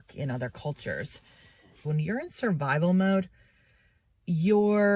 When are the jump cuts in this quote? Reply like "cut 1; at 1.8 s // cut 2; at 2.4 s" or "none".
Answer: cut 1; at 1.8 s